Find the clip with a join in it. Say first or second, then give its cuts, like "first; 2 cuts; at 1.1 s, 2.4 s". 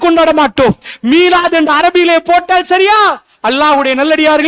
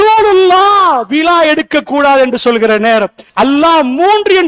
second; 1 cut; at 3.2 s